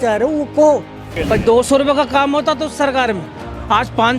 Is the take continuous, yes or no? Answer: no